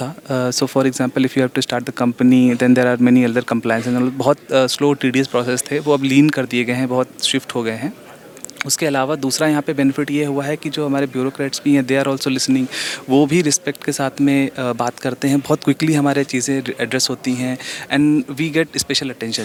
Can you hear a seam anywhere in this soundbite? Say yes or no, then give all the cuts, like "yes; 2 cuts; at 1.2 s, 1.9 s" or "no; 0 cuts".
no; 0 cuts